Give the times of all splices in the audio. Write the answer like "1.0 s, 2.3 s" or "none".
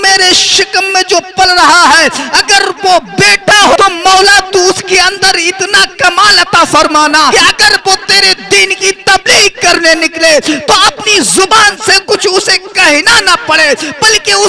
none

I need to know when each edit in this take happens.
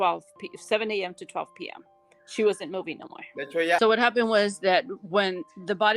3.8 s

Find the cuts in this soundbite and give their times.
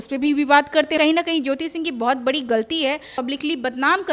1.0 s, 3.2 s

